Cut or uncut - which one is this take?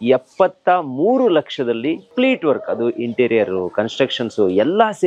cut